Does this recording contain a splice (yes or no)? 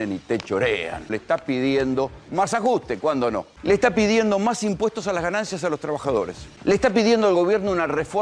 yes